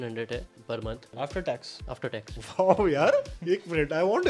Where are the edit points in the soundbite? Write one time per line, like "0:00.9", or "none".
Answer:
0:01.1
0:02.4
0:03.3